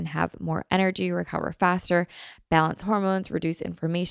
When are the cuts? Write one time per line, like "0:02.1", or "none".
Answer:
none